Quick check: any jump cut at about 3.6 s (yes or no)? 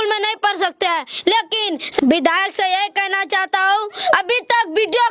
no